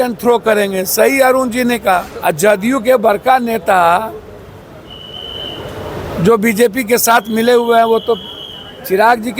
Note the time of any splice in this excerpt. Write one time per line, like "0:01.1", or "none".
0:02.1